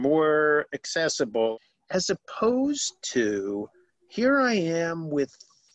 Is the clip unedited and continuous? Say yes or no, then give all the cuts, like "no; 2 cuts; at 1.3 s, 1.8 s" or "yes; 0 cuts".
no; 1 cut; at 1.5 s